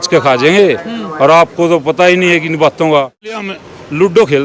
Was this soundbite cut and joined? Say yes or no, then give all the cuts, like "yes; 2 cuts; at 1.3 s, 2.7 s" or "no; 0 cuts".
yes; 1 cut; at 3.5 s